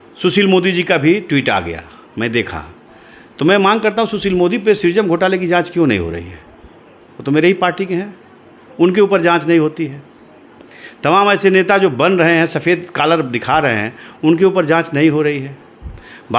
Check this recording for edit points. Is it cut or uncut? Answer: uncut